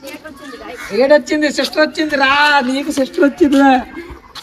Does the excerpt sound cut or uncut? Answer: uncut